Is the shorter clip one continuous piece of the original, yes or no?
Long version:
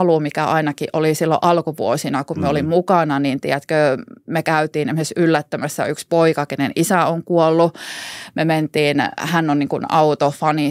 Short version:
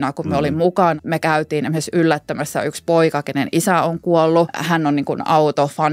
no